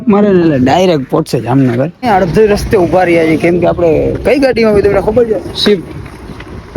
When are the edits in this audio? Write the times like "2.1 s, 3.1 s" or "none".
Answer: 2.0 s